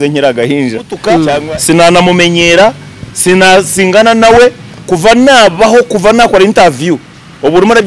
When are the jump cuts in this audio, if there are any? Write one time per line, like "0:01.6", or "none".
0:01.4